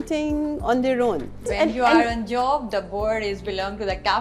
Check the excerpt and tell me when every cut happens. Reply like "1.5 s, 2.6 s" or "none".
1.5 s